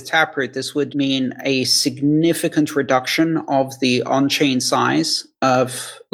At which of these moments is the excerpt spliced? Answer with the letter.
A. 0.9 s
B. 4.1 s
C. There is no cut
A